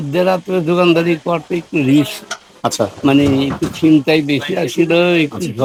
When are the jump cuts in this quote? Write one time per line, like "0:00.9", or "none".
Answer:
none